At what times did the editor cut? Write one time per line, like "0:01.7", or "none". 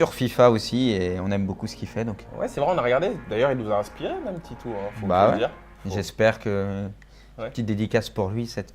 0:06.9